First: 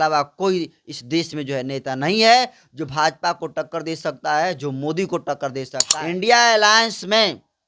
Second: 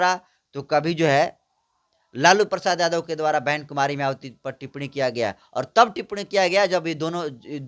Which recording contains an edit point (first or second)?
first